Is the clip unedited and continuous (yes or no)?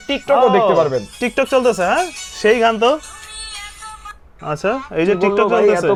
yes